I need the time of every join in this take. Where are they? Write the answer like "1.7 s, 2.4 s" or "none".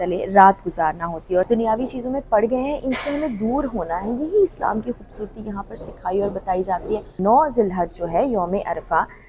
1.5 s, 7.1 s